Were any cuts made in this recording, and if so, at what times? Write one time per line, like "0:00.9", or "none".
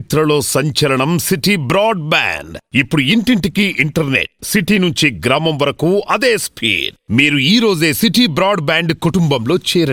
none